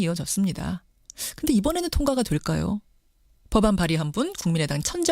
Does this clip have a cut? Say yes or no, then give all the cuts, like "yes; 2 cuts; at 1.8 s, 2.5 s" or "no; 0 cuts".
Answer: no; 0 cuts